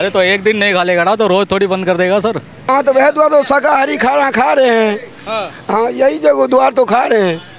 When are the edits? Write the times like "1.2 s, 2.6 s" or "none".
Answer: 2.6 s